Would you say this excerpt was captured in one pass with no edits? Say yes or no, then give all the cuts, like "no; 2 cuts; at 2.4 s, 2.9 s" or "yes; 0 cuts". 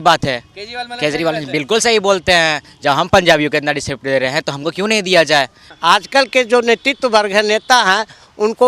no; 1 cut; at 5.6 s